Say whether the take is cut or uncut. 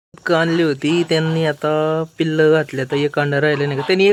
uncut